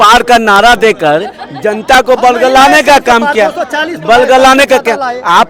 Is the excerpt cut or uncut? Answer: uncut